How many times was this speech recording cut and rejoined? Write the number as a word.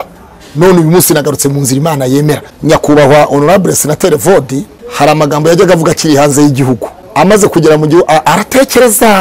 three